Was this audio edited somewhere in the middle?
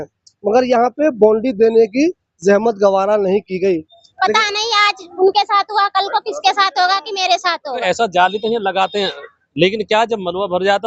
yes; 2 cuts; at 4.0 s, 7.8 s

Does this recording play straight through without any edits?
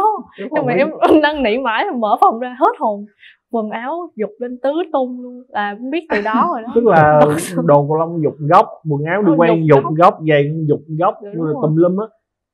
yes; 0 cuts

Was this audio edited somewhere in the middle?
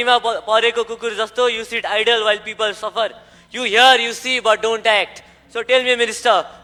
no; 0 cuts

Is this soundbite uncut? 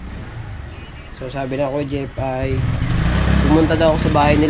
yes; 0 cuts

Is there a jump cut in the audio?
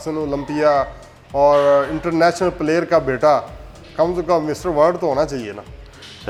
no; 0 cuts

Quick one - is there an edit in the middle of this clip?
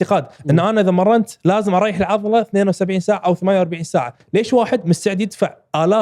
yes; 1 cut; at 4.2 s

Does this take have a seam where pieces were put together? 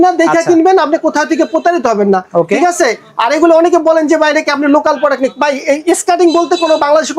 no; 0 cuts

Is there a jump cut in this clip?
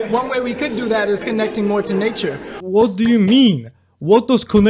yes; 1 cut; at 2.5 s

